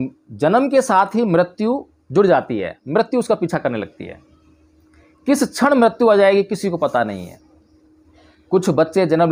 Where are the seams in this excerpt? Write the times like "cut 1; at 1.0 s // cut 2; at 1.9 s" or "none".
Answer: none

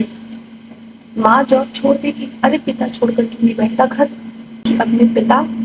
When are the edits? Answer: cut 1; at 4.4 s

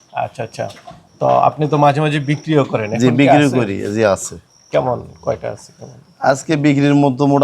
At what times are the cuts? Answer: none

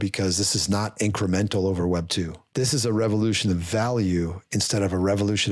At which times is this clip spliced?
cut 1; at 2.4 s

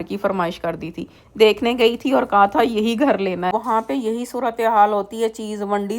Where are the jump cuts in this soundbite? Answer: cut 1; at 3.5 s

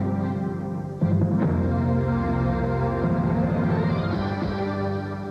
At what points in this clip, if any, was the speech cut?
cut 1; at 2.4 s

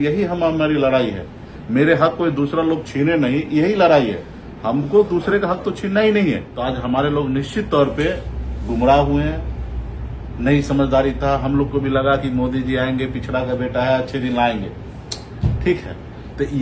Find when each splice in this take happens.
cut 1; at 6.5 s

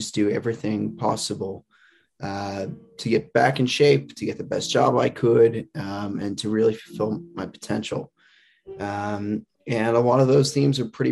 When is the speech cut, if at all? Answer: none

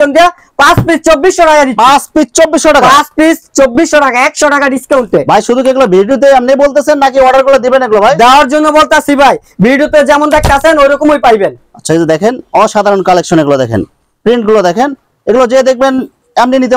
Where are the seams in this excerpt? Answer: none

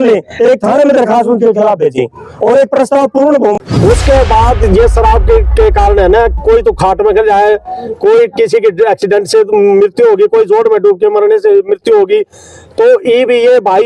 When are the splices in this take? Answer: cut 1; at 3.5 s

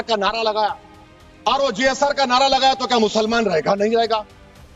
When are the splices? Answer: none

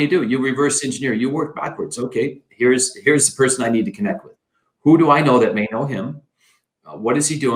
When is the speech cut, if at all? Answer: none

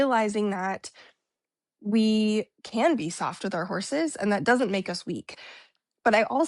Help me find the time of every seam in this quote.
cut 1; at 5.3 s

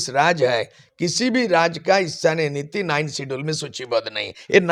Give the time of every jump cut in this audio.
none

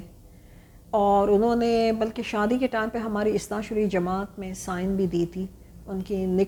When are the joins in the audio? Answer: none

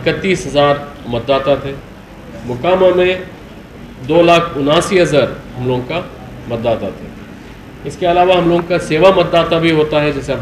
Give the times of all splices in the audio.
none

